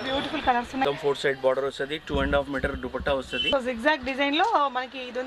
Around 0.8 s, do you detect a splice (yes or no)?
yes